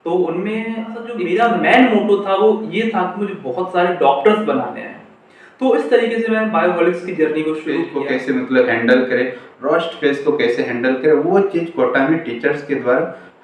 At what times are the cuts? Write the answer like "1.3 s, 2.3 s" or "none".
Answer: 1.2 s, 7.9 s